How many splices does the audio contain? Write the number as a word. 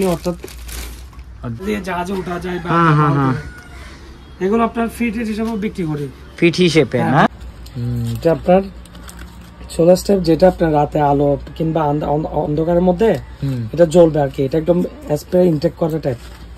two